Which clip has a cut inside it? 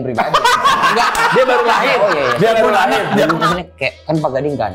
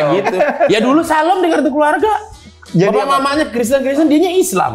first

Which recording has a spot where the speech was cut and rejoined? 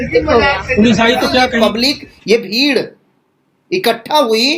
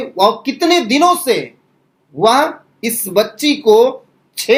first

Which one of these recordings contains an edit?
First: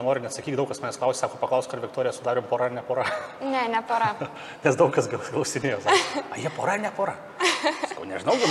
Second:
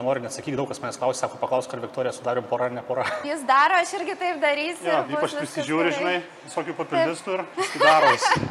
second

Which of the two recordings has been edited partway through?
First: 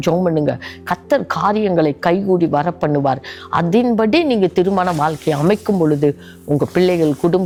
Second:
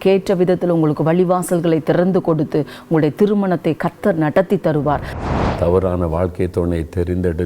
second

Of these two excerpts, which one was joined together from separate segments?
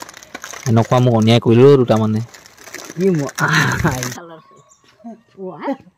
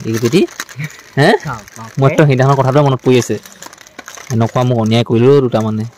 first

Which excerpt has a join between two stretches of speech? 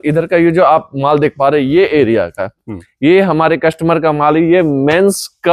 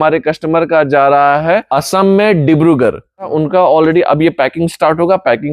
second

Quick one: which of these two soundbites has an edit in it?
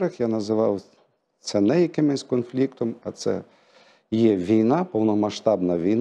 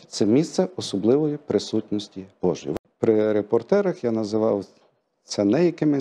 second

